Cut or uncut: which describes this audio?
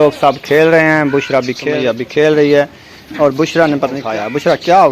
cut